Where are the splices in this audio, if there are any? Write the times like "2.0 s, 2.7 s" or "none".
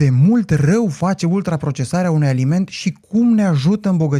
none